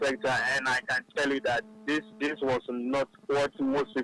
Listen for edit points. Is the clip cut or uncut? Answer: uncut